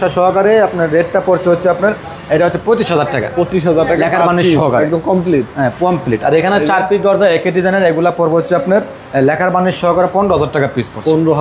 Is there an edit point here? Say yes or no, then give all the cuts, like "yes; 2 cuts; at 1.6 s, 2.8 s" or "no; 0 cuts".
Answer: no; 0 cuts